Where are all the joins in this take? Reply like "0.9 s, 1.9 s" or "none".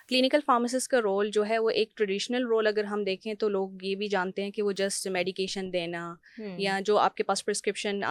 none